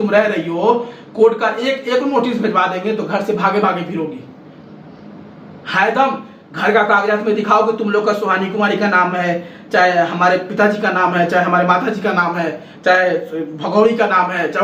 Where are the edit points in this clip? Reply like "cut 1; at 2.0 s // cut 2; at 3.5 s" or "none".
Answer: none